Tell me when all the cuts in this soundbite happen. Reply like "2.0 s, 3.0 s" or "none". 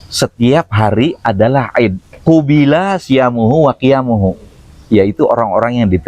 2.1 s

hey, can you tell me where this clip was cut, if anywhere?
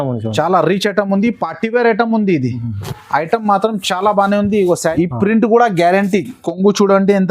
4.9 s

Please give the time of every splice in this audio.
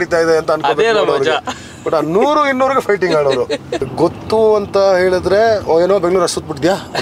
3.9 s

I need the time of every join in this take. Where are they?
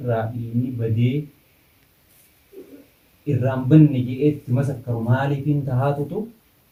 none

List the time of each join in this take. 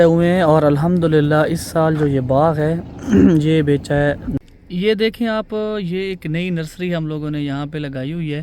4.3 s

